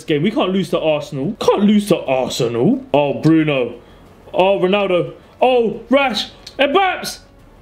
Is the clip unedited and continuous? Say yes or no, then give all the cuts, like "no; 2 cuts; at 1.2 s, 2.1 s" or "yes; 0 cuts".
no; 2 cuts; at 1.3 s, 2.8 s